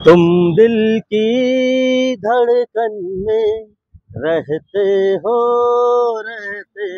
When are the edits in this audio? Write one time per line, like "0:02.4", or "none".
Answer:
none